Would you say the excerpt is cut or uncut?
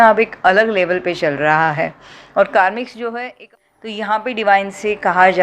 cut